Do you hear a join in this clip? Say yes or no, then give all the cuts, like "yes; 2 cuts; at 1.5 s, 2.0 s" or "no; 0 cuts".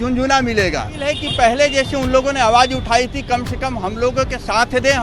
yes; 1 cut; at 1.1 s